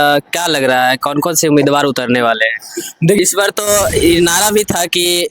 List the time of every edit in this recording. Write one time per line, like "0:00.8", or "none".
0:03.2